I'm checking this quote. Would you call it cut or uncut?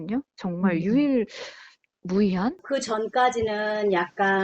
cut